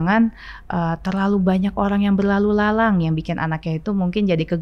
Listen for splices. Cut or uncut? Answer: uncut